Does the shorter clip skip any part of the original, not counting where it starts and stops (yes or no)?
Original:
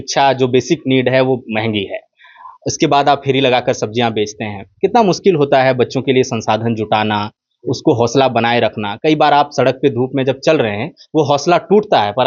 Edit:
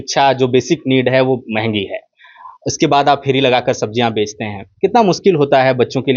no